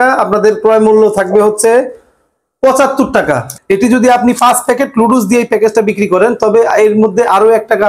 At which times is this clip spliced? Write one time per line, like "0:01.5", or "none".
0:03.5